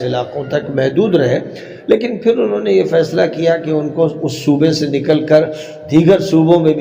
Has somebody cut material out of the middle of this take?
no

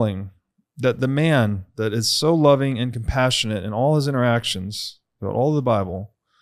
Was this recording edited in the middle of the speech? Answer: no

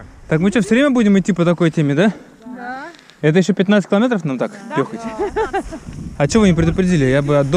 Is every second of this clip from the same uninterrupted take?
yes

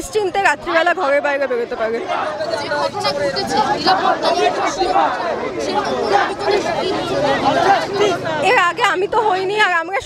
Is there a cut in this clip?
no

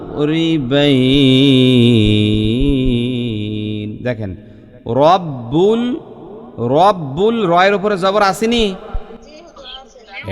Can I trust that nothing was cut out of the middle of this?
no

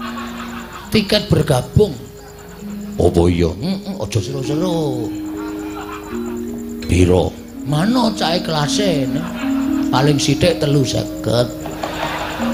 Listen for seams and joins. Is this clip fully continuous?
yes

